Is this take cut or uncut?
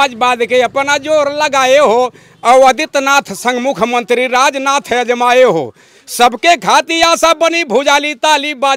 uncut